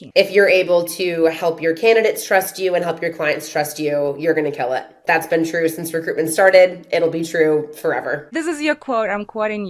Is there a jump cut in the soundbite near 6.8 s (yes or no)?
no